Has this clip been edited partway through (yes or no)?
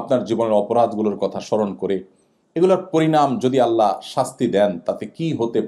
no